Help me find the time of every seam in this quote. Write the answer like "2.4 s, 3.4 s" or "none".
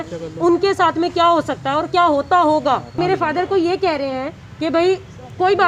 3.0 s